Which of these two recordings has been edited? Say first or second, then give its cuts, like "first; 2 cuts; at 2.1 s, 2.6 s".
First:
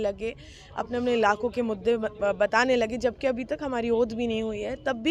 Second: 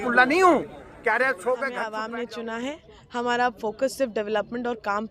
second; 1 cut; at 1.9 s